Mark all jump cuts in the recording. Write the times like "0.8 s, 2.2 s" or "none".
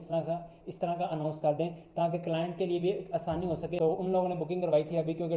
3.7 s